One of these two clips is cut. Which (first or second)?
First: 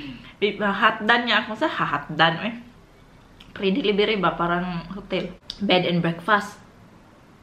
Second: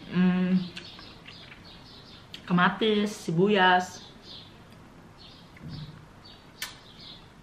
first